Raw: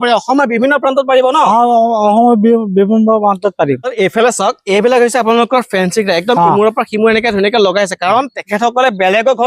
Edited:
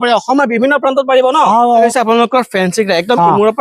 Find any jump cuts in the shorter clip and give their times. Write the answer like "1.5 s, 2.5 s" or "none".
1.9 s